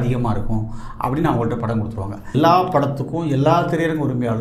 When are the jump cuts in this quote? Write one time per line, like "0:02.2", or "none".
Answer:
0:02.3